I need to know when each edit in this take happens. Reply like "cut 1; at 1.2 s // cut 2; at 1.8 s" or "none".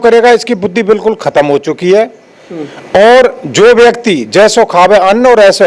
none